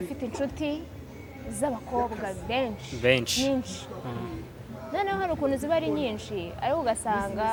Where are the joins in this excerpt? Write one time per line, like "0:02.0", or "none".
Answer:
none